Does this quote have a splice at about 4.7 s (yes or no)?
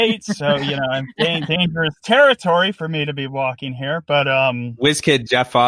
yes